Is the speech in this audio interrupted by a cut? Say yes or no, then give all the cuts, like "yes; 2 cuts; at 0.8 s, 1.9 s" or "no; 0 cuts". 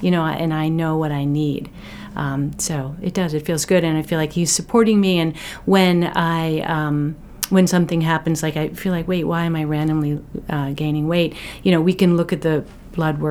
no; 0 cuts